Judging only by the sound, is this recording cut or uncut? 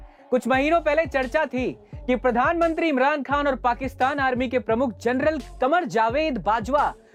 uncut